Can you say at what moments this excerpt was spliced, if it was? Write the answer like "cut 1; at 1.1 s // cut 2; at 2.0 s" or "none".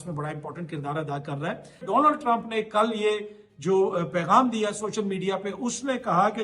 cut 1; at 1.8 s